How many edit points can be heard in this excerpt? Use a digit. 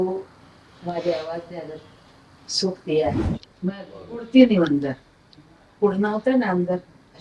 1